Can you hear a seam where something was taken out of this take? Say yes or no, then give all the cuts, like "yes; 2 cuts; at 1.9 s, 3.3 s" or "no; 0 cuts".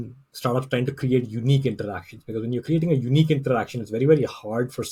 no; 0 cuts